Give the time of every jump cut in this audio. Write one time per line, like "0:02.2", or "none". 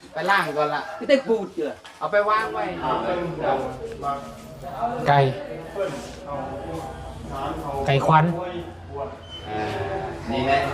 0:02.7